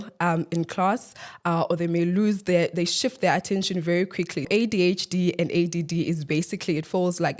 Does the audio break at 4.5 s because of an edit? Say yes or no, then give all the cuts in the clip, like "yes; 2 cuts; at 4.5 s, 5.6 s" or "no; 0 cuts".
yes; 1 cut; at 4.5 s